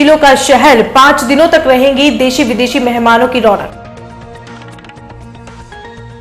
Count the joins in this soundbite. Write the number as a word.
one